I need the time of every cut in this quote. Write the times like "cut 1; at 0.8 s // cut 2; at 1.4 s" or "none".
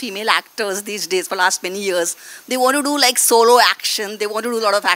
none